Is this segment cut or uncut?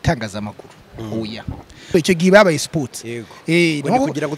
cut